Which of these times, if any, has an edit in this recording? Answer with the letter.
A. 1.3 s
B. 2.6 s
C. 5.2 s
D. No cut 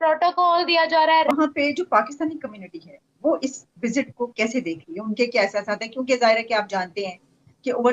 A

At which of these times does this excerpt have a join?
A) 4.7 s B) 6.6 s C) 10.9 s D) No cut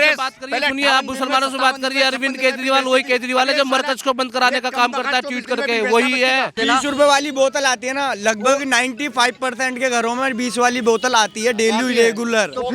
B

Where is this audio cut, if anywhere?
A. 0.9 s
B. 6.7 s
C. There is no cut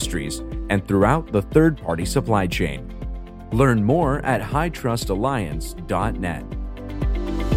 B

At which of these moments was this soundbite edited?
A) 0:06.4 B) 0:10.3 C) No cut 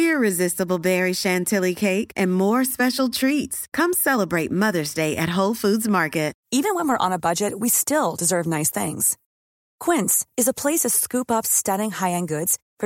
A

